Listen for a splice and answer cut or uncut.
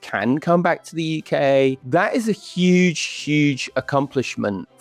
cut